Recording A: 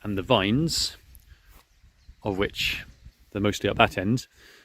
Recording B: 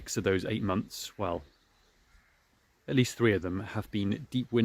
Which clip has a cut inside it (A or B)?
A